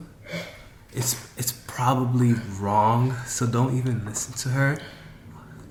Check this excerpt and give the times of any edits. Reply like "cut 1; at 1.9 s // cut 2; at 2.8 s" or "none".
none